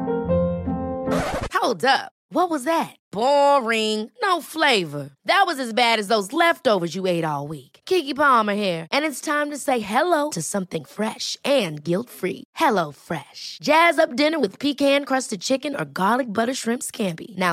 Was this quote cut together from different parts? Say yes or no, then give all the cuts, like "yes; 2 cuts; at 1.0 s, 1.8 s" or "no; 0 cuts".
no; 0 cuts